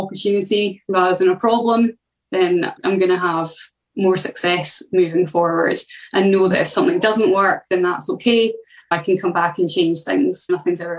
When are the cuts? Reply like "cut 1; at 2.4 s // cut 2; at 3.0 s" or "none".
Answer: none